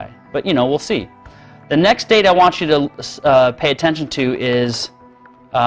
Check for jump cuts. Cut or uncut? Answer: uncut